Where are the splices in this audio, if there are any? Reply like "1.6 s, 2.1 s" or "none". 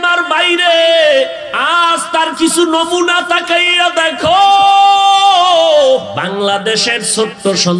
1.5 s, 6.1 s